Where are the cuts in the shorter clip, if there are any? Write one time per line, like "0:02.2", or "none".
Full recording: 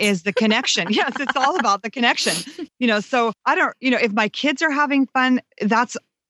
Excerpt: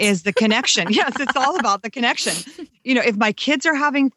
0:02.8